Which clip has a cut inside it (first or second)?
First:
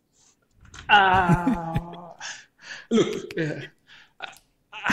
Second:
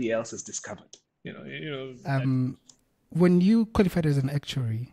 second